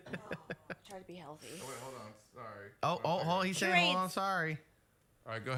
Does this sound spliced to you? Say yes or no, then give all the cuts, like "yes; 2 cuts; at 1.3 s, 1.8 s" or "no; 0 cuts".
no; 0 cuts